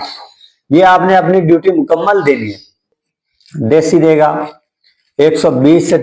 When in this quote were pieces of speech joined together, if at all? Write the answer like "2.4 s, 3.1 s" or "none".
2.9 s